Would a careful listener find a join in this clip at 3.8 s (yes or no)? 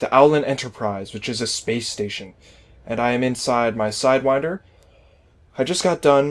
yes